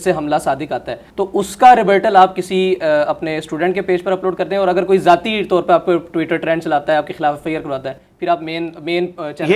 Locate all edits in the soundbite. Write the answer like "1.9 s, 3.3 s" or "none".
1.0 s